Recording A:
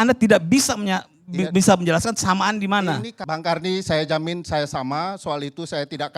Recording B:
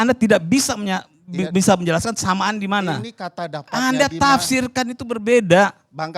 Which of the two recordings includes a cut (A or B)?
A